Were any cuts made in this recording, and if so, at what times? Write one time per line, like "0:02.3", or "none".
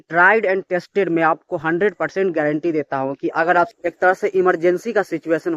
0:03.7